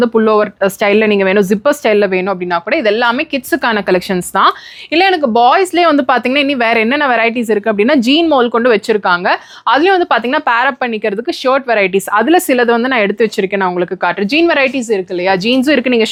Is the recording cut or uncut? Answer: uncut